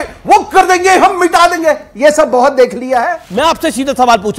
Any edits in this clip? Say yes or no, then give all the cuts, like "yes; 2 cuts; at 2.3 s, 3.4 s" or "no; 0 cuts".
yes; 1 cut; at 3.2 s